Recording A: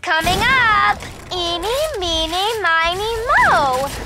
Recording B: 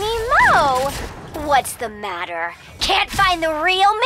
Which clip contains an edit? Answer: A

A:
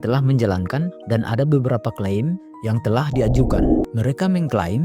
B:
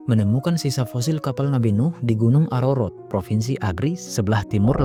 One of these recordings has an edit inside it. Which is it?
A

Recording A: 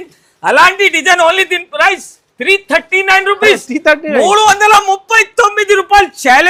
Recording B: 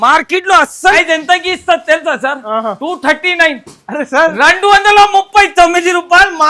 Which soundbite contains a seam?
B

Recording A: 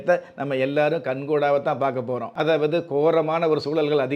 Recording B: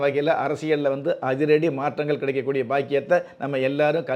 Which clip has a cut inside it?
A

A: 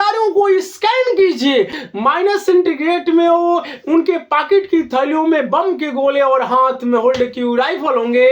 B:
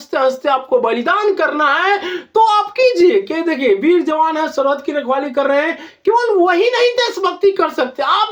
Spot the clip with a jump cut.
A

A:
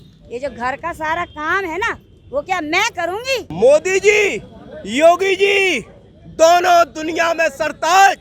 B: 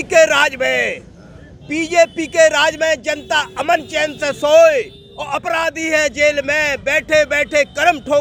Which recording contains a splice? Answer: A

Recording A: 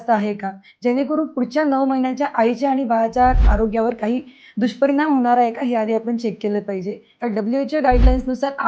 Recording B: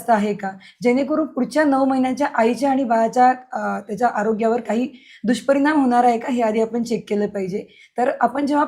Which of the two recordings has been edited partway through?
A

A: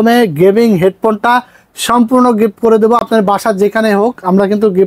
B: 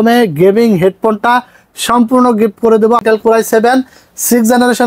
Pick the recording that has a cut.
B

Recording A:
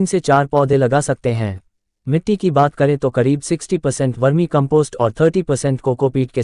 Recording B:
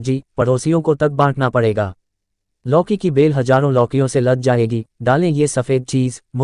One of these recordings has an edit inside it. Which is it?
B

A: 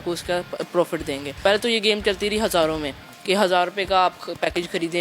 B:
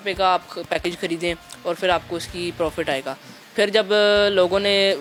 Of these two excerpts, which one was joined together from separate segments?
A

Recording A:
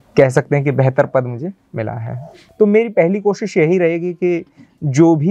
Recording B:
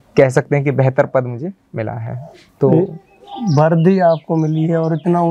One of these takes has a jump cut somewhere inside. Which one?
A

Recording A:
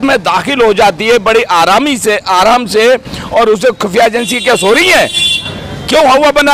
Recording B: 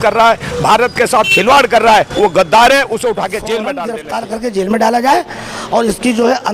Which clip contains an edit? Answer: B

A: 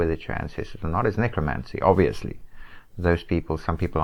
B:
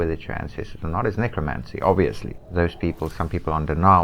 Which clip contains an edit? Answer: B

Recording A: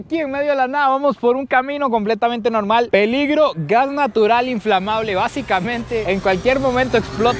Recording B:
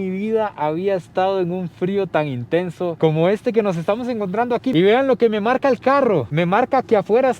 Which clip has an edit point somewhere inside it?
B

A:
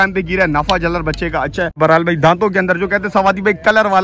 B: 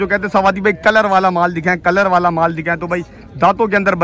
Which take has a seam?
A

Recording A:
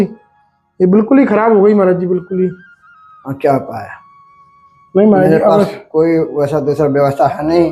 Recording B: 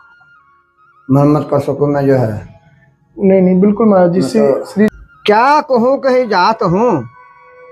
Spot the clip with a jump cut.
B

